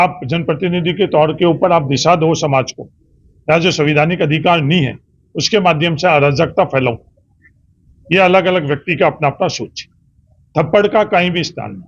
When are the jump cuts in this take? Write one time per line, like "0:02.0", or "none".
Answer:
none